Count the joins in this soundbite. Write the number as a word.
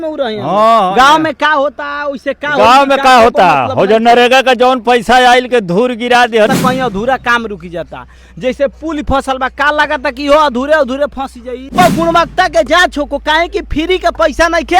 two